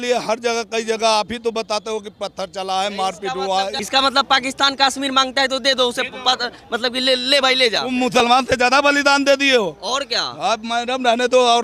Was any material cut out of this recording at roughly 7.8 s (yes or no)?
yes